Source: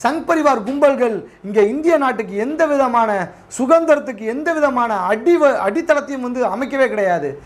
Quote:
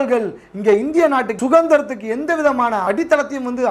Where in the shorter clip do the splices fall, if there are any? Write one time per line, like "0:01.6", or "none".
0:01.3
0:02.8